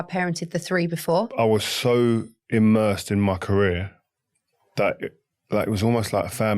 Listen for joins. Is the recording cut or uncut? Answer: cut